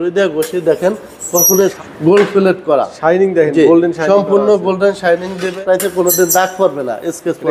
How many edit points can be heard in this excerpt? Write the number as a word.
two